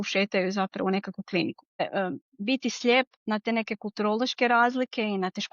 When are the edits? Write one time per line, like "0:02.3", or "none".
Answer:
0:01.8